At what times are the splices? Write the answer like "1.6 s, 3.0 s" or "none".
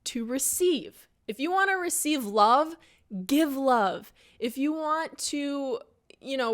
none